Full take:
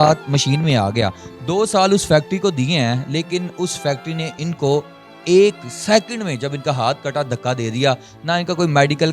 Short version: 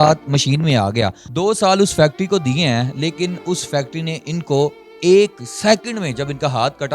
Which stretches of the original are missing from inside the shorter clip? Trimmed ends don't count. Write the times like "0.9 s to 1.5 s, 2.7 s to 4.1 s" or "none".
1.2 s to 1.4 s, 5.0 s to 5.1 s